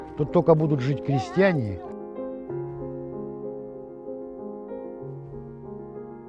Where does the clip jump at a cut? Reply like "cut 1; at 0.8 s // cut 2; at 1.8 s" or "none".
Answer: cut 1; at 1.7 s // cut 2; at 3.2 s